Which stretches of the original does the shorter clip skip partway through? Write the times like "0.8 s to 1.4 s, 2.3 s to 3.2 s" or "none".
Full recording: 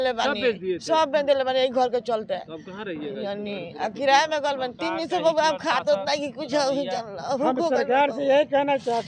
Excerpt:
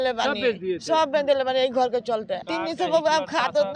2.5 s to 4.8 s